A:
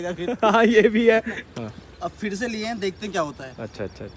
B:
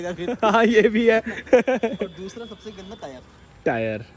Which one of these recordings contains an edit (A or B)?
A